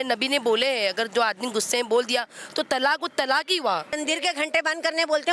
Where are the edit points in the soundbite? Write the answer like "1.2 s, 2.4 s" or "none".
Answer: 3.9 s

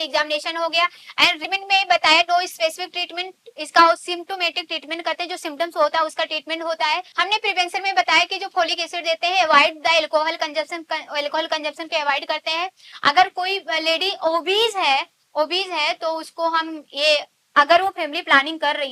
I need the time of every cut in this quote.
1.4 s, 7.1 s, 12.9 s

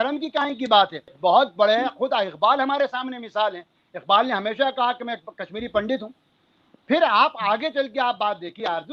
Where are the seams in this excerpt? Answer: 1.1 s

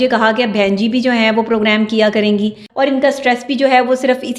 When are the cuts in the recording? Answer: 2.6 s

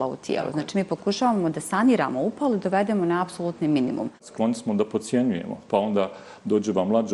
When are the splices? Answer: 4.3 s

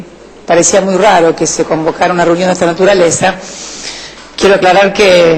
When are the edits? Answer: 1.9 s

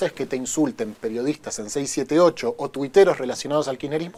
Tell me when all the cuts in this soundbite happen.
none

